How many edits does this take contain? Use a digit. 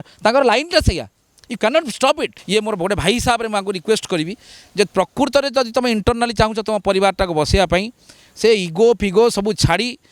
1